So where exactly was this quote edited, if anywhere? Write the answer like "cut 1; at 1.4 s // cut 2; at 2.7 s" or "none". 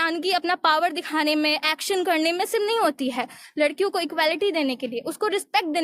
none